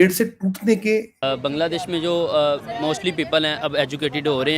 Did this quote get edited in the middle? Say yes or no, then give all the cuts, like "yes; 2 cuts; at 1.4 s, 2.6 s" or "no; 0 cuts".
yes; 1 cut; at 1.1 s